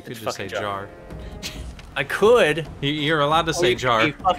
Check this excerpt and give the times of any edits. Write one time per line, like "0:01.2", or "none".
0:01.8

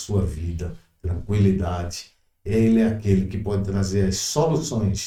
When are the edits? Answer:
none

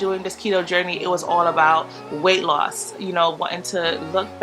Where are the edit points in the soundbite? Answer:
none

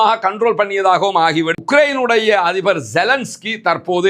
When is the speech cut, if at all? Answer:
0:01.6

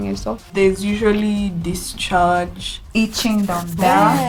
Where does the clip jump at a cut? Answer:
none

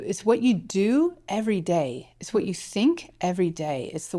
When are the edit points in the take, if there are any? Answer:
none

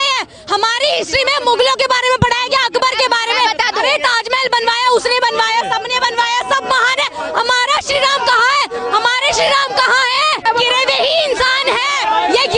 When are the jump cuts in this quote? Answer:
0:10.4

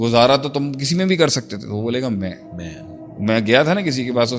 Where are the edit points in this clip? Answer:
none

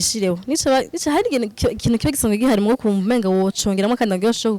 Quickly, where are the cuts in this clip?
0:00.9

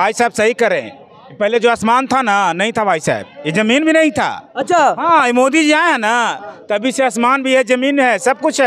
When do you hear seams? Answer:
none

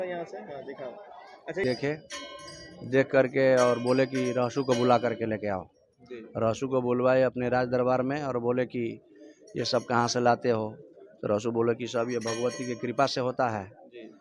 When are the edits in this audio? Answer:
0:01.6

